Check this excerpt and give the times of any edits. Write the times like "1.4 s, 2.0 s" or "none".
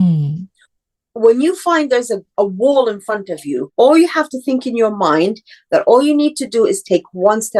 2.3 s, 3.7 s

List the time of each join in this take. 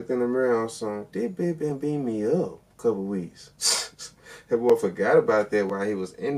none

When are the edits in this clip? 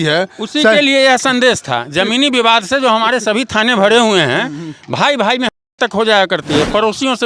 none

